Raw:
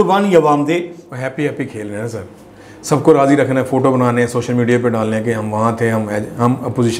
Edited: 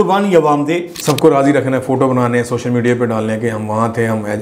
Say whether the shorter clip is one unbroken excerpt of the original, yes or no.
no